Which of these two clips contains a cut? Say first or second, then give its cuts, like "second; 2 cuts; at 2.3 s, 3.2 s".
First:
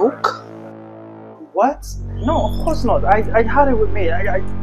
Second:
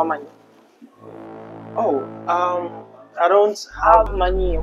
first; 1 cut; at 0.9 s